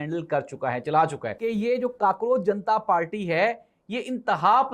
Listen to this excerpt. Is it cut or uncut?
cut